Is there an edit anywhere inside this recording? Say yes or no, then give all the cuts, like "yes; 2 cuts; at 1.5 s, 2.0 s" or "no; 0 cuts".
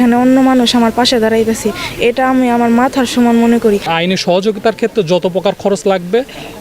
yes; 1 cut; at 3.9 s